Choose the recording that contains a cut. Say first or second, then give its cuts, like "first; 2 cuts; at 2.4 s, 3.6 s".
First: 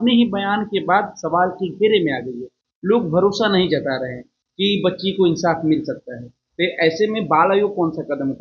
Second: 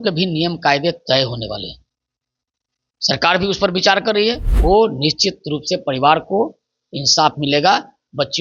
second; 1 cut; at 4.5 s